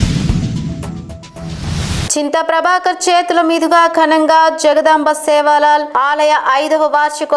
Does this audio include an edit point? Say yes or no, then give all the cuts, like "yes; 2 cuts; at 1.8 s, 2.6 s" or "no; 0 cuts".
yes; 1 cut; at 2.0 s